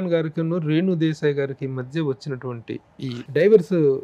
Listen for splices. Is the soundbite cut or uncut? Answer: uncut